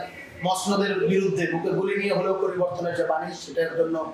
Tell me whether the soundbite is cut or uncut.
uncut